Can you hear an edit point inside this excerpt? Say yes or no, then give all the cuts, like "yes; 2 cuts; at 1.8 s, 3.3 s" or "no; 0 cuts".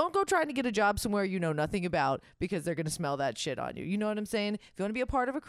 no; 0 cuts